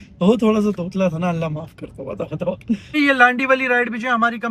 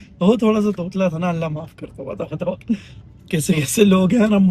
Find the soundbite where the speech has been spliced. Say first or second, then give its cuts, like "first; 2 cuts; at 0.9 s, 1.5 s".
first; 1 cut; at 2.9 s